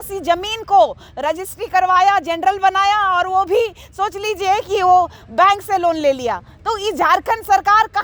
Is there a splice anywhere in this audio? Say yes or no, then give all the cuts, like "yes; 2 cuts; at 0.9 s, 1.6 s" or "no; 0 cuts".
no; 0 cuts